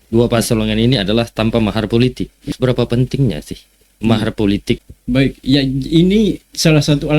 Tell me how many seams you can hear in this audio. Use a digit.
2